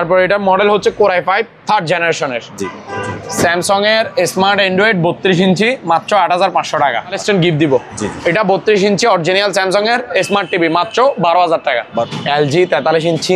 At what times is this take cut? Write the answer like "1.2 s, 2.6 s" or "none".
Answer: 2.7 s, 7.2 s, 12.0 s